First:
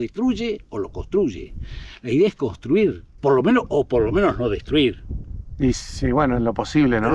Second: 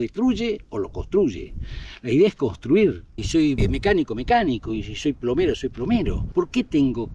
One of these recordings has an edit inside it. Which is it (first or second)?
second